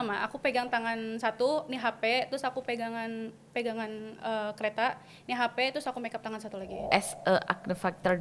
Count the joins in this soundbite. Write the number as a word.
one